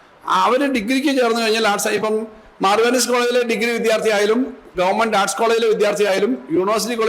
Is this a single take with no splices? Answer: yes; 0 cuts

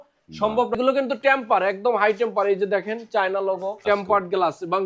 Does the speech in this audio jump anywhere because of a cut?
yes; 2 cuts; at 0.8 s, 3.8 s

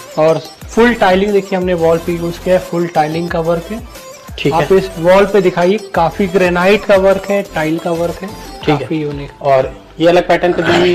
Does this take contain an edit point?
no; 0 cuts

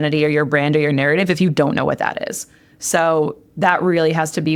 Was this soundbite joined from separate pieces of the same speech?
no; 0 cuts

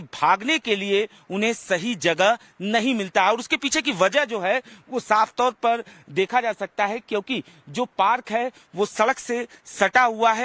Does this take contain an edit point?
yes; 1 cut; at 7.2 s

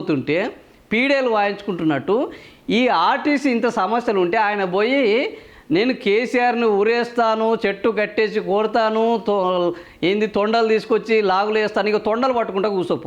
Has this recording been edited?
no; 0 cuts

